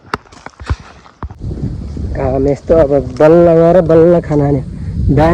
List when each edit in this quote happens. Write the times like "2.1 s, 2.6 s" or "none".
1.4 s